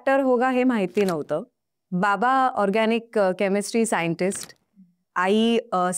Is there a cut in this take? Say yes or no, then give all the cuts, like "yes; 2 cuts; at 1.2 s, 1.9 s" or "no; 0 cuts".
no; 0 cuts